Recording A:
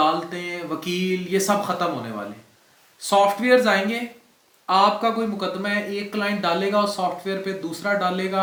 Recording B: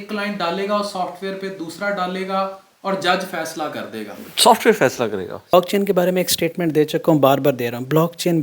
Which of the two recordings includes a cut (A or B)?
B